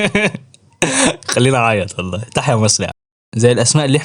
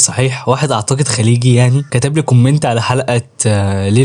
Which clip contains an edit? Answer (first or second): first